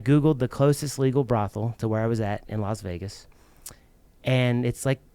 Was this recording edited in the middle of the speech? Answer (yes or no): no